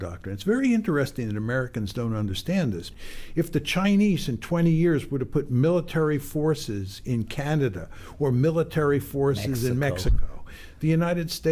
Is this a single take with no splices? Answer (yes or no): no